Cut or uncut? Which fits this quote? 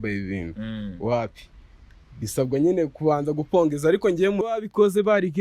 cut